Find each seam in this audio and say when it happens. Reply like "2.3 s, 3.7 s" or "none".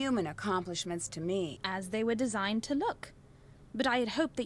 1.6 s